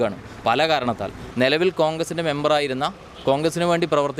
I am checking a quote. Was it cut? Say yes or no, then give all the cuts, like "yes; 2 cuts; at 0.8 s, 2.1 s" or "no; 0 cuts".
yes; 1 cut; at 1.2 s